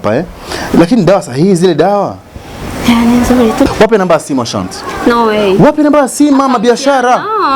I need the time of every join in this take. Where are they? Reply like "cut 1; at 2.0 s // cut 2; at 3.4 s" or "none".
cut 1; at 3.6 s